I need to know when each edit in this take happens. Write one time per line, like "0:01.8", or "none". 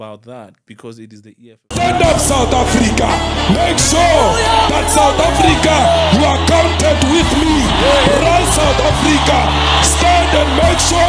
0:01.7

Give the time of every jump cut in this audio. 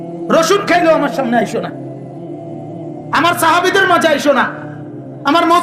0:01.7
0:03.1

